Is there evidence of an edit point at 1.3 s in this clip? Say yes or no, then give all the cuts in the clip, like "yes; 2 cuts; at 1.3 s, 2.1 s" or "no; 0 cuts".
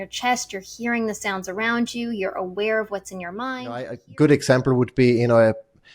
no; 1 cut; at 4.0 s